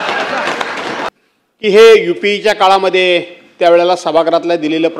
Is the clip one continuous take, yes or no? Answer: no